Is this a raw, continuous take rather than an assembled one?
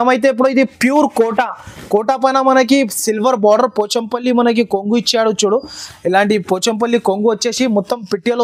yes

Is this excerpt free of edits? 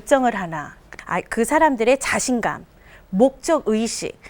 no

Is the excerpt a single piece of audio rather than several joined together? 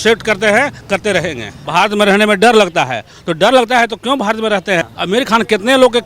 no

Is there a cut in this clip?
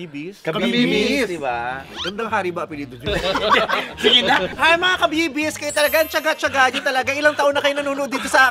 yes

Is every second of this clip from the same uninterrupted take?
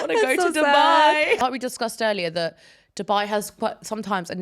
no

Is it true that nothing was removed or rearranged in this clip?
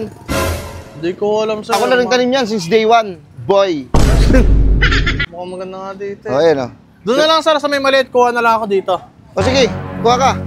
no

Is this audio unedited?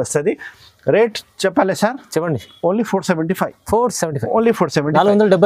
yes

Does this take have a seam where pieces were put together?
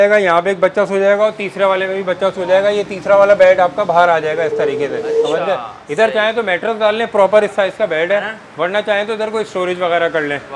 no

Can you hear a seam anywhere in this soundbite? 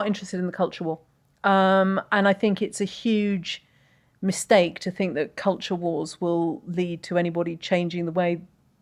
no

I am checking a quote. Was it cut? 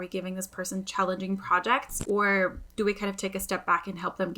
yes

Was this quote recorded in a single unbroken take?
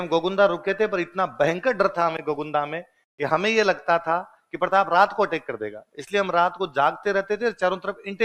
yes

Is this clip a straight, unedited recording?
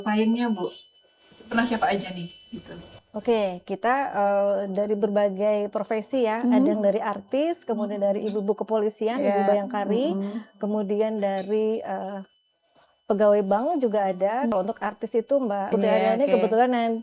no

